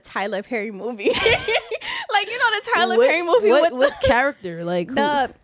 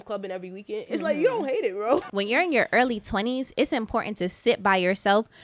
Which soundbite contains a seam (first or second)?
second